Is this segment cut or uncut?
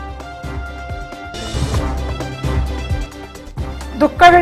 uncut